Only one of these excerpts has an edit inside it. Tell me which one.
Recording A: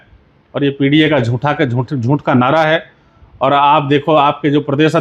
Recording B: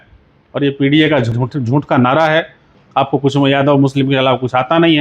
B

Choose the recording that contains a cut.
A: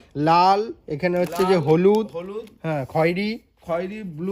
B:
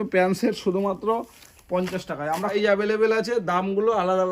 B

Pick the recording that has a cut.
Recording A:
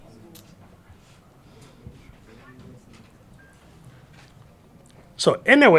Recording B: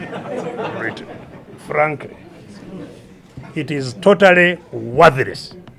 A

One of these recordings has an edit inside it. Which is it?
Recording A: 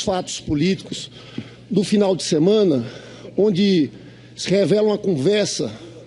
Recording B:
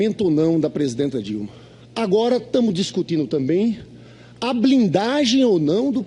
A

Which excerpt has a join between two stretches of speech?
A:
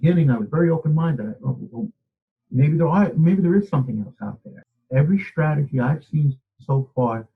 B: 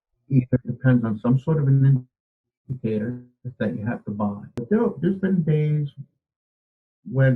B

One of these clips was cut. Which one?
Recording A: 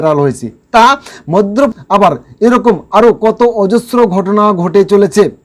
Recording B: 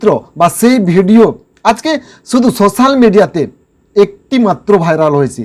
A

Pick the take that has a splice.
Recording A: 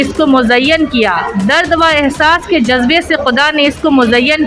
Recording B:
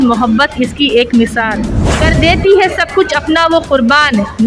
B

